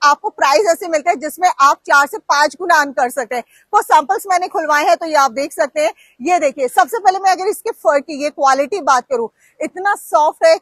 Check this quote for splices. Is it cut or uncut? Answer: uncut